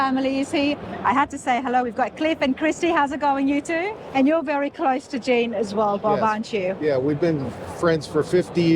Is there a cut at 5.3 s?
no; 1 cut; at 4.0 s

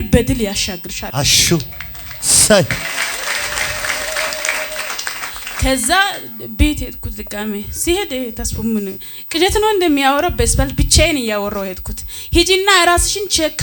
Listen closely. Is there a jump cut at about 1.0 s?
yes; 1 cut; at 1.0 s

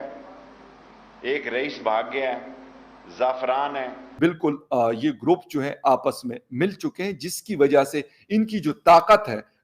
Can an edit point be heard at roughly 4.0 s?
yes; 1 cut; at 4.0 s

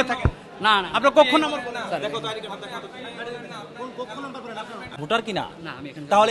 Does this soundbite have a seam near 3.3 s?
no; 1 cut; at 5.0 s

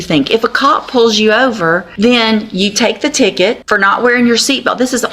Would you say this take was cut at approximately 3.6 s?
yes; 2 cuts; at 1.9 s, 3.6 s

